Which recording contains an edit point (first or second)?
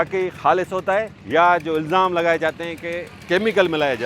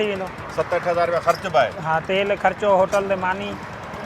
first